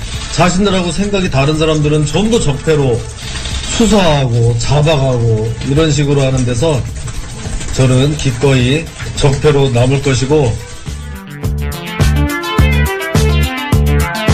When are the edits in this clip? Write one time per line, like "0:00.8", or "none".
none